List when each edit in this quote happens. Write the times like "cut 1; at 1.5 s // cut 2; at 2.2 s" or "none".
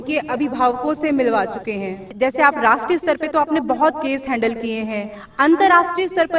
cut 1; at 2.1 s